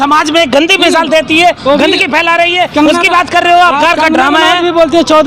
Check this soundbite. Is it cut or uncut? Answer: cut